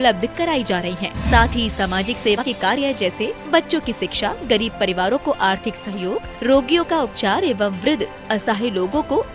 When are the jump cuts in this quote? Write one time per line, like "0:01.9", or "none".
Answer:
0:02.4